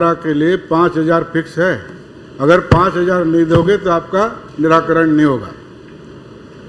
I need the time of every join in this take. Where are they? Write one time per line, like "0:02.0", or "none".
none